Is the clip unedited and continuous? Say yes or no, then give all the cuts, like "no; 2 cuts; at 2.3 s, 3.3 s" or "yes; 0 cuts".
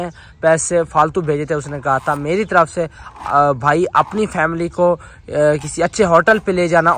yes; 0 cuts